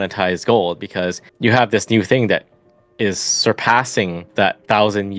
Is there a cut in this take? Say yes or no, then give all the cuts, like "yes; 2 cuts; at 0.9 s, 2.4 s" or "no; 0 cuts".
yes; 2 cuts; at 1.3 s, 4.2 s